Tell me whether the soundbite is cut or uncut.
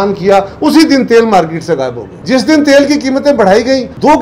cut